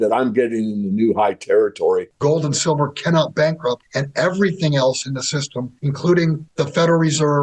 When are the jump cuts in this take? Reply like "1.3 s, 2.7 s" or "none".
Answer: 2.1 s, 3.9 s, 5.8 s, 6.4 s